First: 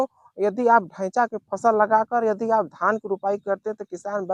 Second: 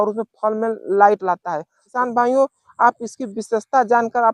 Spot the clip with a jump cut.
second; 1 cut; at 1.9 s

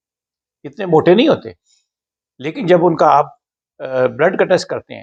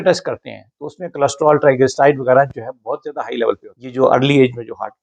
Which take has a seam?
second; 1 cut; at 3.8 s

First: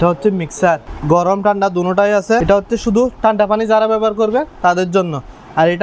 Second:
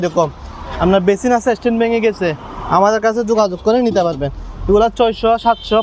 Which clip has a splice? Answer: first; 2 cuts; at 0.9 s, 2.4 s

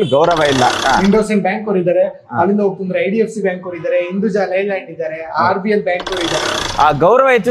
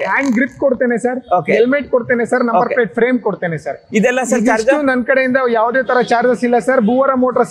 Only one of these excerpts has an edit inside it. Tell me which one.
first; 2 cuts; at 0.8 s, 6.6 s

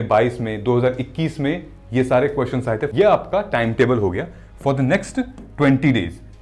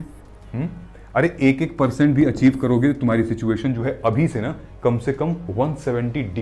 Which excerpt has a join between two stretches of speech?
first; 1 cut; at 2.9 s

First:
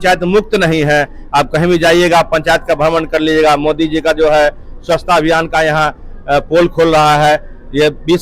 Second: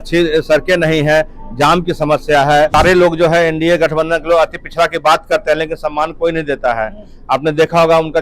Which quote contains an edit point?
second; 1 cut; at 2.7 s

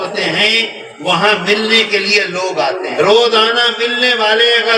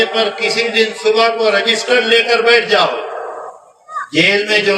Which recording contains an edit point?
first; 1 cut; at 2.9 s

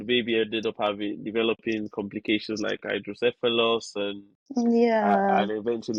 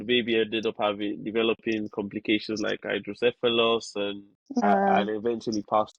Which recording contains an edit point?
second; 1 cut; at 4.6 s

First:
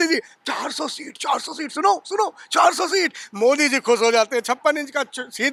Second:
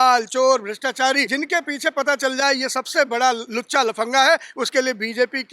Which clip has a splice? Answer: second; 2 cuts; at 1.3 s, 3.5 s

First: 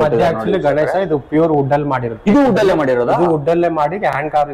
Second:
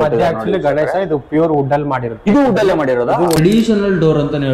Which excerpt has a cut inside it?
second; 1 cut; at 3.4 s

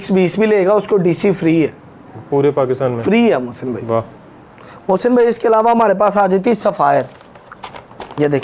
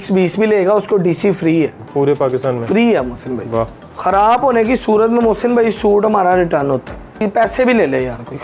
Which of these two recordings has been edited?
second; 3 cuts; at 1.8 s, 3.8 s, 7.2 s

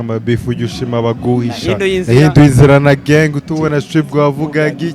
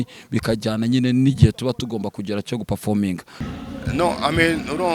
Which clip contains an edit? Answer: second; 1 cut; at 3.4 s

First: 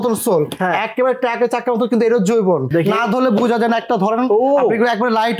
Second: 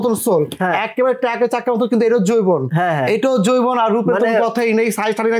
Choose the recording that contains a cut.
first; 1 cut; at 2.7 s

